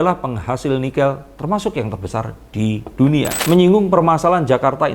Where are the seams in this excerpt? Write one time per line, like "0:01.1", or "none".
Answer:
0:03.4